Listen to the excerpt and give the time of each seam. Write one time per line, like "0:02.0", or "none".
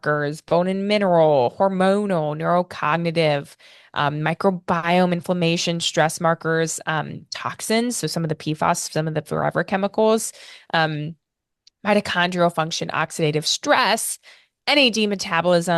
none